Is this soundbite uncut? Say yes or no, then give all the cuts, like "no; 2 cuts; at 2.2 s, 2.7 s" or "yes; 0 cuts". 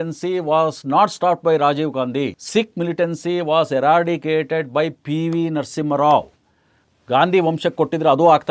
no; 1 cut; at 2.4 s